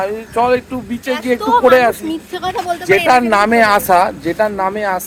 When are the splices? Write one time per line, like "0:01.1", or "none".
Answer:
none